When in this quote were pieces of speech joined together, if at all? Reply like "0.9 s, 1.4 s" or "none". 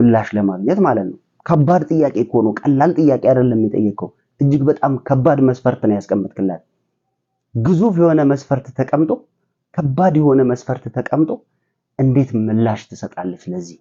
none